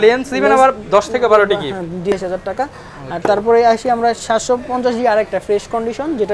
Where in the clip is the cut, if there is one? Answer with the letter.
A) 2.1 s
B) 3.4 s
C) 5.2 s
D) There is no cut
A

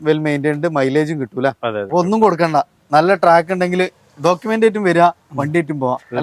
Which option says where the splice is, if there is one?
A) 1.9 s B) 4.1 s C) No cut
A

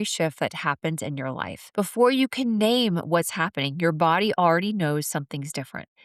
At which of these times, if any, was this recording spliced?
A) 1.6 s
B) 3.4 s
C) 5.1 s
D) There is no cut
A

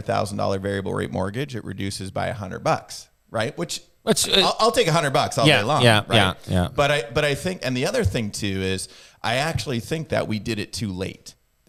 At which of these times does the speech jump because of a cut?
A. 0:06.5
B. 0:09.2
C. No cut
C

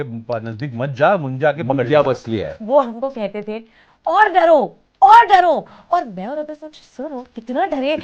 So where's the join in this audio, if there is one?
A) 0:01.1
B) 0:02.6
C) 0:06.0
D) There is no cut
B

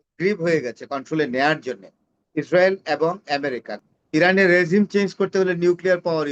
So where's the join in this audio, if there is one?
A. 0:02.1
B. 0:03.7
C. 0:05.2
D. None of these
B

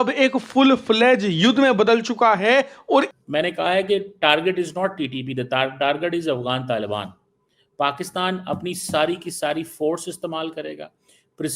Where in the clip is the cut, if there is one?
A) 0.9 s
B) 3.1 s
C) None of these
B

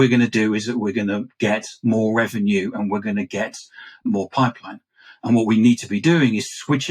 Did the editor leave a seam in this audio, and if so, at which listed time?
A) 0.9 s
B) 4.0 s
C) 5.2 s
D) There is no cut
B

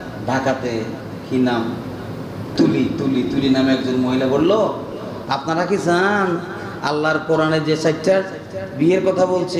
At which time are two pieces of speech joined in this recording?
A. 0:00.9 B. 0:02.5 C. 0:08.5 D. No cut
B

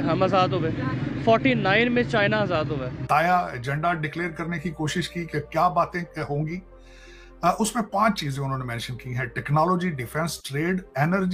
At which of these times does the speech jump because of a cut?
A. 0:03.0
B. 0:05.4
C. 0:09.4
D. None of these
A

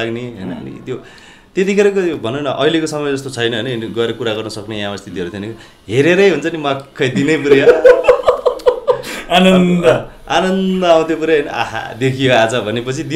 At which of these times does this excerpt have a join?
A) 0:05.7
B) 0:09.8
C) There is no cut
C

